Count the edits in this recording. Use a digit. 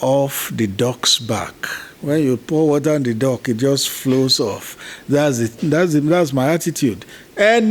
0